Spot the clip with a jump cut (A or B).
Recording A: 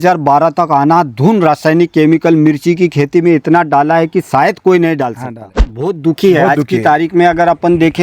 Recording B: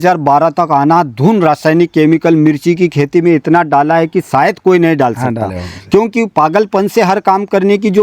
A